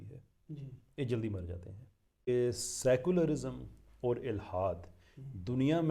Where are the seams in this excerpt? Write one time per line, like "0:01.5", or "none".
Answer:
0:02.3